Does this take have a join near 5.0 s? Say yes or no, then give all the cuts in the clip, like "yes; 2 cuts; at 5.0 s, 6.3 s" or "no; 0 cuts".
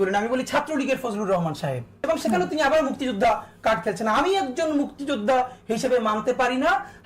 no; 1 cut; at 2.0 s